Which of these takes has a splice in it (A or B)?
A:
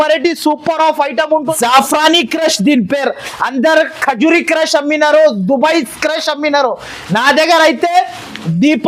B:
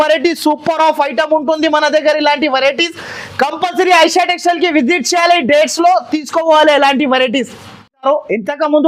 A